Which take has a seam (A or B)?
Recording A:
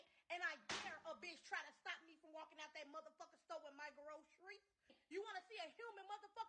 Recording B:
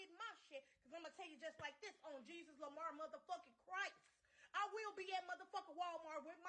A